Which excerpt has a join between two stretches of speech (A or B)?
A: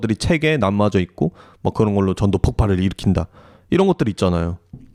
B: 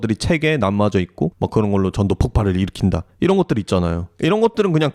B